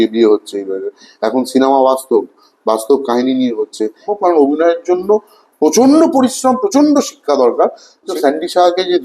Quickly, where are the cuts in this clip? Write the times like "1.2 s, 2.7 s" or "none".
4.1 s, 8.0 s